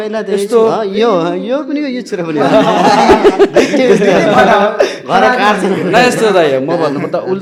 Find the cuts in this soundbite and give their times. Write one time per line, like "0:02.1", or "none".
none